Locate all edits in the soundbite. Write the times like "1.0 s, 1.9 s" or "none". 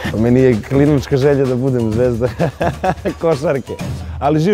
none